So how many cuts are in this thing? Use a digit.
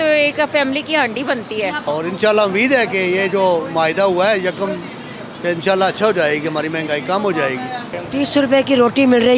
2